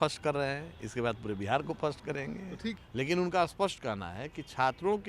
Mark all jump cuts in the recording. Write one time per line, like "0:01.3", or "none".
0:02.8